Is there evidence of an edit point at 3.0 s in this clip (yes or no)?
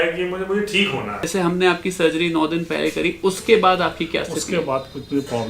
no